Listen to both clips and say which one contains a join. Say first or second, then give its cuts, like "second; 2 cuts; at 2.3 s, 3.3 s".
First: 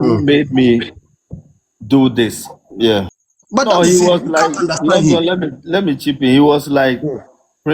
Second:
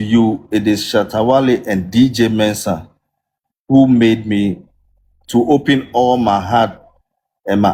first; 1 cut; at 3.2 s